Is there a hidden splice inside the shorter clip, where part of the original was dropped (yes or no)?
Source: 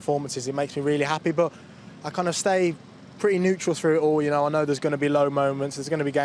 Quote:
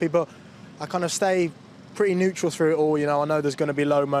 no